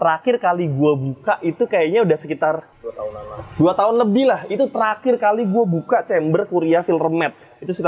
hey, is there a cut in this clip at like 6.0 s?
no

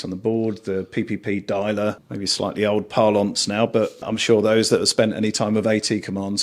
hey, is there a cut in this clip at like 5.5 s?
no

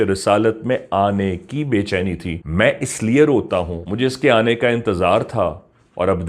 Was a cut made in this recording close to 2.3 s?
yes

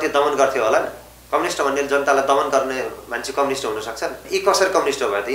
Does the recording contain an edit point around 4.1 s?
yes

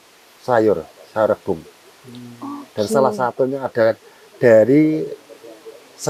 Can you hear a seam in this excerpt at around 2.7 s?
no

